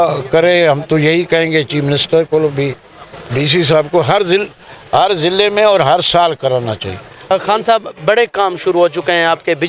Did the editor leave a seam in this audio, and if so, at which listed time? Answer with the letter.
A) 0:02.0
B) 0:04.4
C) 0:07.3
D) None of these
C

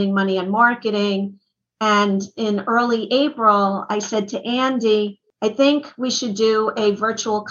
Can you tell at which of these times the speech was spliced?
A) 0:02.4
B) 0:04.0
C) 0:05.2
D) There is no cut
C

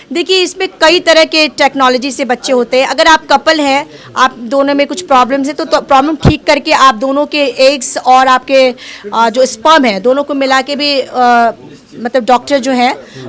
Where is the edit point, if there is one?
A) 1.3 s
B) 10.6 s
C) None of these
C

